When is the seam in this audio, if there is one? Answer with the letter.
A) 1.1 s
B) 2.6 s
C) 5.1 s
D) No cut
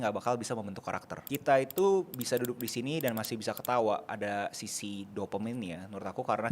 A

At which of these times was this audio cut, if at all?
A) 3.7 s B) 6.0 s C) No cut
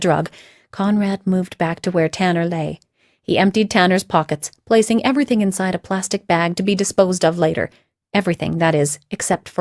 A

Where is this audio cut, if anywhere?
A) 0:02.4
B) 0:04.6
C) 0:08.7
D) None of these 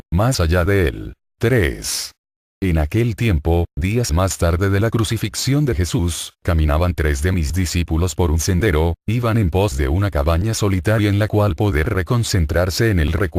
B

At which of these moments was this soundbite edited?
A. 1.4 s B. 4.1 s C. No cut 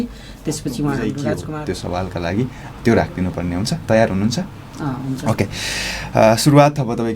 A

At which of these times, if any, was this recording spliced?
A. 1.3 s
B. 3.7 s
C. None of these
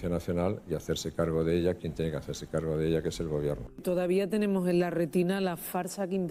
B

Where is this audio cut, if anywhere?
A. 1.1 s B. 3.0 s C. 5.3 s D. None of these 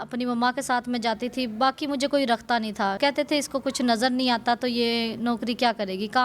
B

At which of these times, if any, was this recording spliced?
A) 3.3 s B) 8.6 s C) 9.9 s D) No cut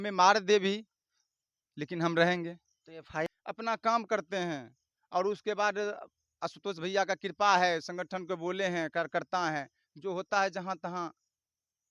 A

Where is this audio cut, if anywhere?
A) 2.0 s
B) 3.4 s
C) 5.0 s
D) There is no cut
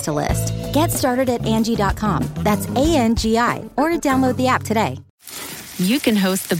C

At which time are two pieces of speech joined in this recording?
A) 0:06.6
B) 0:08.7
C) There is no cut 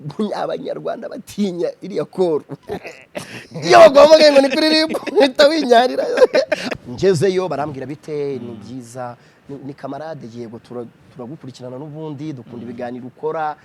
A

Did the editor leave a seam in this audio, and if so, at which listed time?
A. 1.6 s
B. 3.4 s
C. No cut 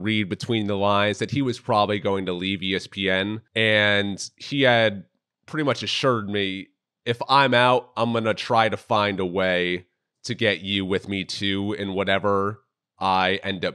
B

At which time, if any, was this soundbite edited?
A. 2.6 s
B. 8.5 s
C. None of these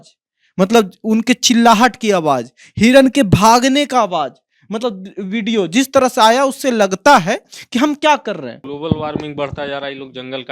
B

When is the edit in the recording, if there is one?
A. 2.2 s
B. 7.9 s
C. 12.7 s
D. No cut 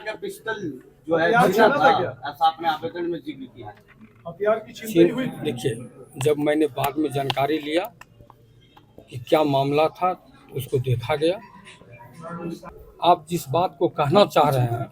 C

